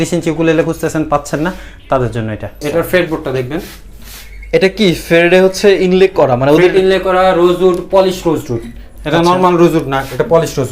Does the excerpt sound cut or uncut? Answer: cut